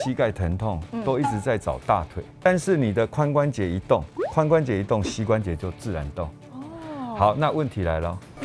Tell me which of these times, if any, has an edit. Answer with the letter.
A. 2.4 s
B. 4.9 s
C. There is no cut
A